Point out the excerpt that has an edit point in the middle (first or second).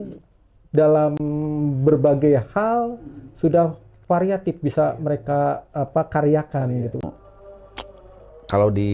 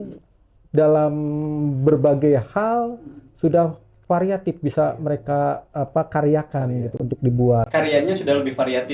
first